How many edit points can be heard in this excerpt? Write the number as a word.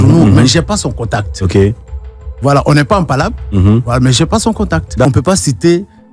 one